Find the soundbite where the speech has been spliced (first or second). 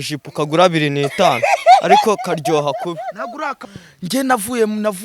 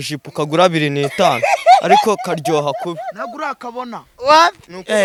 first